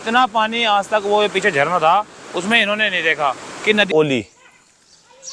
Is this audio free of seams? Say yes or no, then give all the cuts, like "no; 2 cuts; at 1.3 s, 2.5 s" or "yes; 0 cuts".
no; 1 cut; at 3.9 s